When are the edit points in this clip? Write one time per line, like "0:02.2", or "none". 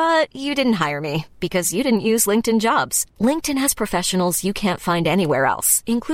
none